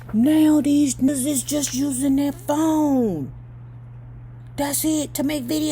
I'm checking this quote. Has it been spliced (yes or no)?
yes